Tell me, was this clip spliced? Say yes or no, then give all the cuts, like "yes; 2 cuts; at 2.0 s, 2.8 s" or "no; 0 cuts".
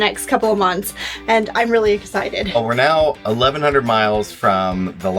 yes; 1 cut; at 2.6 s